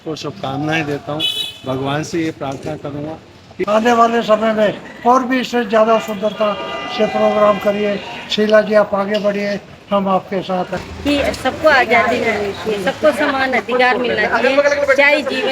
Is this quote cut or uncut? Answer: cut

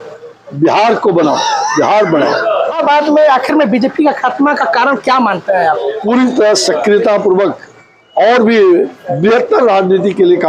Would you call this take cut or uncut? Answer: cut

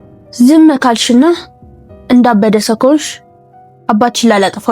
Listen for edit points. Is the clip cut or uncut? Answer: uncut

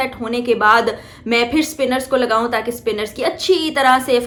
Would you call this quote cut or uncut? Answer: uncut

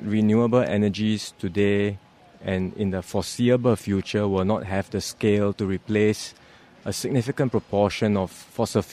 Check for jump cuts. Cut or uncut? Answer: uncut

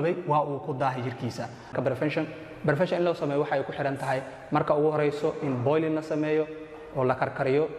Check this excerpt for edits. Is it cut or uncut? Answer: cut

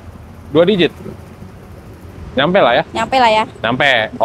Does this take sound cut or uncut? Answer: uncut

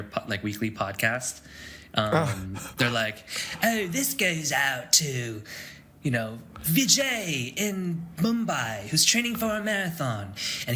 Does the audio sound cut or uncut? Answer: uncut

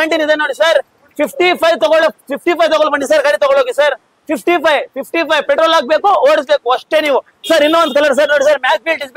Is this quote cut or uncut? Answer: uncut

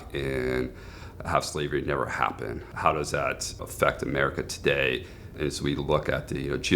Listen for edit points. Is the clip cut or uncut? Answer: cut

